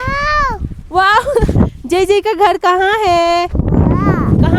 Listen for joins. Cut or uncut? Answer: uncut